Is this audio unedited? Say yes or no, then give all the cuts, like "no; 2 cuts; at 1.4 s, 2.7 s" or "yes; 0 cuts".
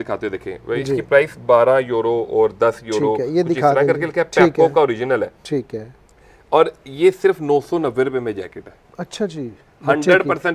yes; 0 cuts